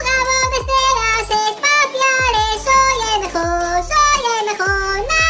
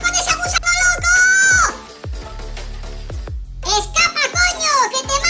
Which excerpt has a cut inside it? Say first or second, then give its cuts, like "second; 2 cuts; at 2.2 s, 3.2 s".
second; 2 cuts; at 1.7 s, 3.6 s